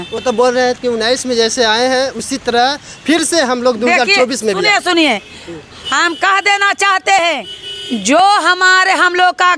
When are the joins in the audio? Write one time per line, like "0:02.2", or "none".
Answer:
none